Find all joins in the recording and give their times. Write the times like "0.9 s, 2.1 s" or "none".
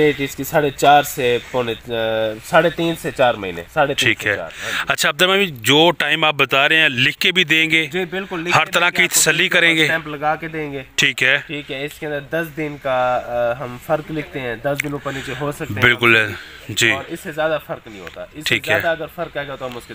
none